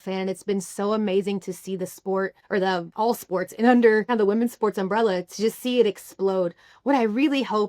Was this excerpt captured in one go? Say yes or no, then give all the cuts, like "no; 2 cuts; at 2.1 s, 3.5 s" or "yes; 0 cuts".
no; 2 cuts; at 2.6 s, 4.1 s